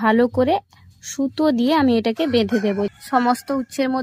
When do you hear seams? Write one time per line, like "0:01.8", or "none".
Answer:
0:02.9